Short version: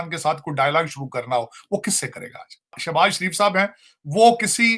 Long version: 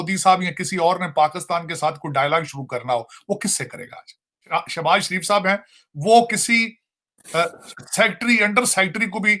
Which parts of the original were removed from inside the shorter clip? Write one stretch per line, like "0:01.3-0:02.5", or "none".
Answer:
0:04.4-0:04.7